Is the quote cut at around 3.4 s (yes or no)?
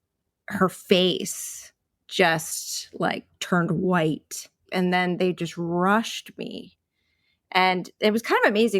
no